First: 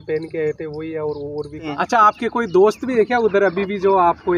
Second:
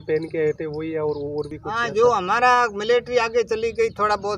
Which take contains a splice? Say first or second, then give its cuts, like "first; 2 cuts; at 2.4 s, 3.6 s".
first; 1 cut; at 1.7 s